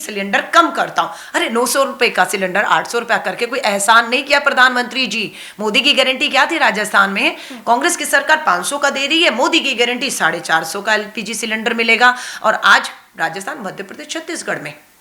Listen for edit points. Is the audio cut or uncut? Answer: uncut